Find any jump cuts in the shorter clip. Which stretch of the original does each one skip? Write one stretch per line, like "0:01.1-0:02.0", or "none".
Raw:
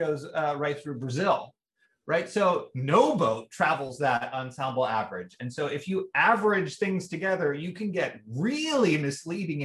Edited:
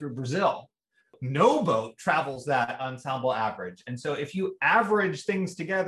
0:02.0-0:02.7